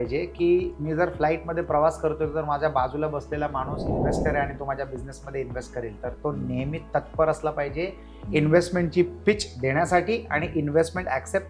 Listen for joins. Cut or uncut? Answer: uncut